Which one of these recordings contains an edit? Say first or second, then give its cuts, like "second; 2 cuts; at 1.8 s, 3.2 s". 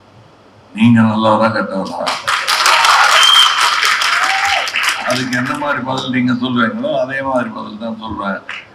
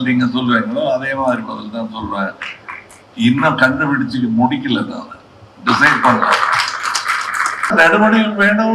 second; 1 cut; at 7.7 s